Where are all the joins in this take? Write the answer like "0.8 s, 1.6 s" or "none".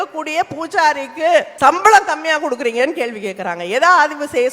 1.5 s